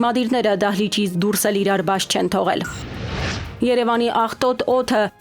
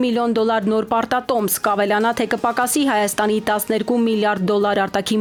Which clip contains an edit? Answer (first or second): first